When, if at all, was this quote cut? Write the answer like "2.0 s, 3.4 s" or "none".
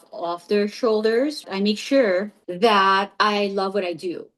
1.4 s, 2.4 s